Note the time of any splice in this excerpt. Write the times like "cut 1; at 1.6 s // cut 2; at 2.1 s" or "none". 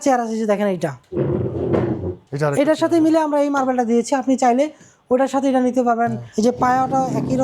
cut 1; at 1.0 s // cut 2; at 2.2 s // cut 3; at 6.2 s